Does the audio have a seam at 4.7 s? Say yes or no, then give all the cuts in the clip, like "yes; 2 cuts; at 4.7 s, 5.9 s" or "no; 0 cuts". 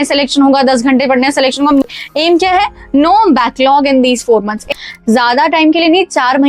yes; 2 cuts; at 1.9 s, 4.7 s